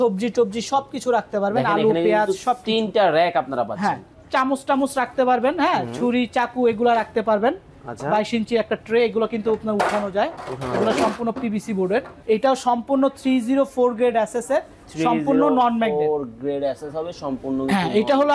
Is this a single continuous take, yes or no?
no